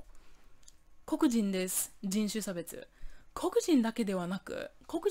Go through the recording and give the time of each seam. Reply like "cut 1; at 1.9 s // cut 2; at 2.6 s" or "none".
none